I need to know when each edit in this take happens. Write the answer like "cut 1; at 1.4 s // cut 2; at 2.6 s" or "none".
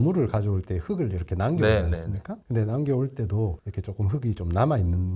none